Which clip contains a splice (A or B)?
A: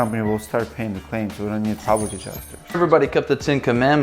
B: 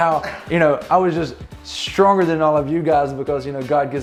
A